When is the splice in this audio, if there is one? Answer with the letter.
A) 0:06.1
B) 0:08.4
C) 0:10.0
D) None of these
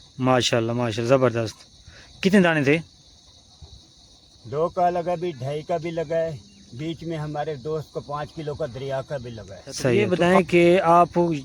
C